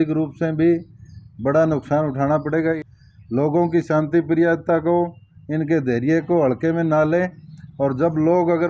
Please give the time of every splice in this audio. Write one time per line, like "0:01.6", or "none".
0:02.8

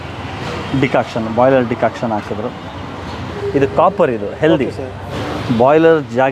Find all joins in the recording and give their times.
0:03.3

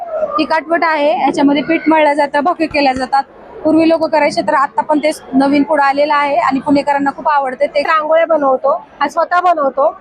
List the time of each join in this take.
0:07.9

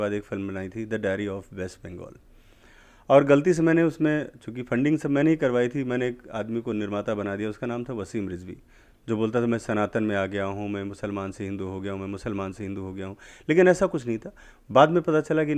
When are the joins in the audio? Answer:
none

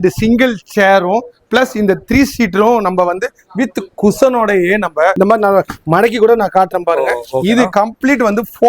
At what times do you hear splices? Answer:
0:05.1

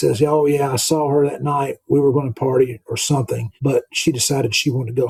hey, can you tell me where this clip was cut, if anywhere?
none

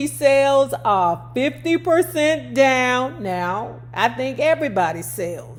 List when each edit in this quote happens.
none

